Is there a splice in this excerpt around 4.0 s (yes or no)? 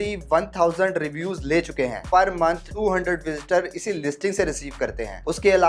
no